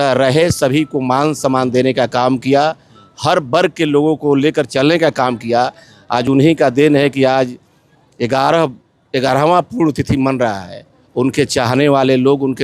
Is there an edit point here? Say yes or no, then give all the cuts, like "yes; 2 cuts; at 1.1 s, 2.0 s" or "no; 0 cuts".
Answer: no; 0 cuts